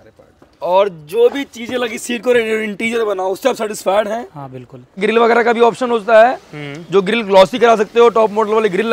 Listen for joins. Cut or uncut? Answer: cut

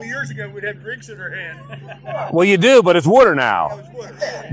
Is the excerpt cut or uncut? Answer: uncut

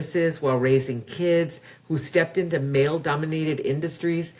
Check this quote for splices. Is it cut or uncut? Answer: uncut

